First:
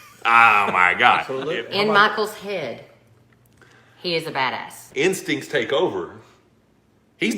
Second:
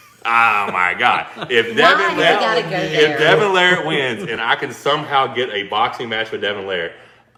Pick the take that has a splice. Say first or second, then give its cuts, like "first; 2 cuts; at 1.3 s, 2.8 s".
first; 2 cuts; at 1.3 s, 4.8 s